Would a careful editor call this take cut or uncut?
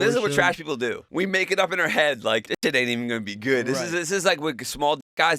cut